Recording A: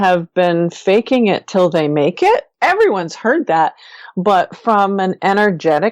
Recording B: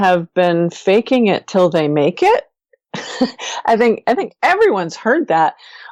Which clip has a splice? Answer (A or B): A